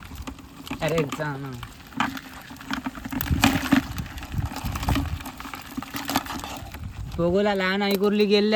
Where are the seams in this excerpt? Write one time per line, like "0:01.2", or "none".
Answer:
none

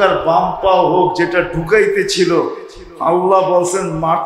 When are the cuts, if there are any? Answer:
none

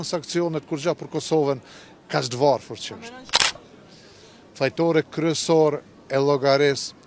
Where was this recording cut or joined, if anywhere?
0:03.6

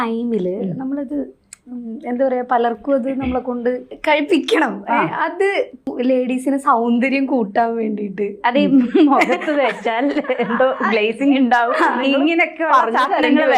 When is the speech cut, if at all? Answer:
0:03.9
0:05.9

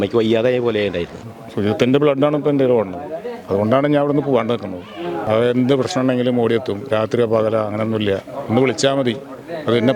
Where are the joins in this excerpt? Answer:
0:01.2
0:05.2

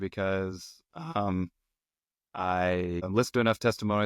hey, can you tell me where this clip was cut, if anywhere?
0:03.1

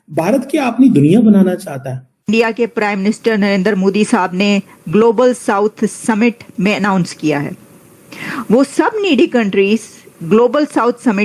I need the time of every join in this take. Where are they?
0:02.3

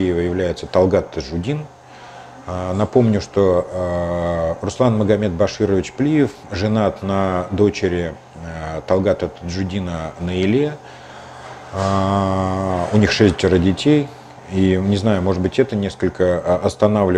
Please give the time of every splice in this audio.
none

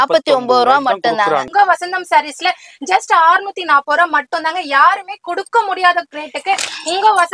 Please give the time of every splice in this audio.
0:01.5

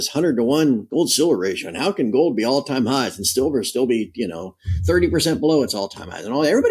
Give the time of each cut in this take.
none

